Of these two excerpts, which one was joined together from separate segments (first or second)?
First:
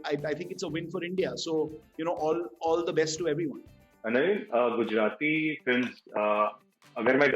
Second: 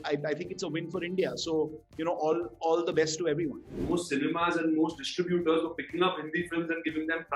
second